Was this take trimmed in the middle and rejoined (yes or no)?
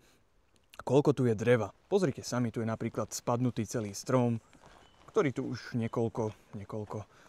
no